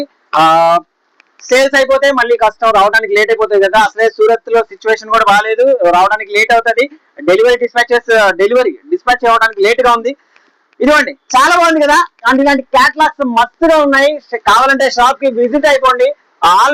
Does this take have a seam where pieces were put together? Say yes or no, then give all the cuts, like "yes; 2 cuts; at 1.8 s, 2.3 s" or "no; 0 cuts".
no; 0 cuts